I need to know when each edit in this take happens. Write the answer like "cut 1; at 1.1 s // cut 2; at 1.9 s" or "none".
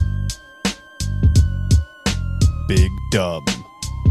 none